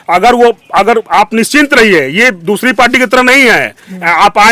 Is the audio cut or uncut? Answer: uncut